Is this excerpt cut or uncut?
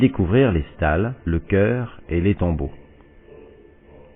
uncut